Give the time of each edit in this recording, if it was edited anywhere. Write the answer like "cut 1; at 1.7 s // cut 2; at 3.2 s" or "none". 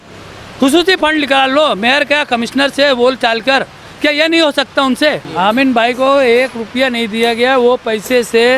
cut 1; at 5.2 s